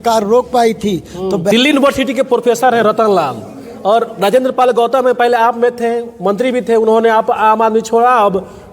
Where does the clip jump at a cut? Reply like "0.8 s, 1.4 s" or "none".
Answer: 1.5 s